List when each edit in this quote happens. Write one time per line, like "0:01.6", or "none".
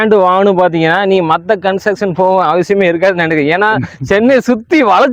none